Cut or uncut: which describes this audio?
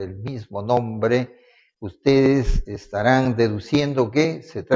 uncut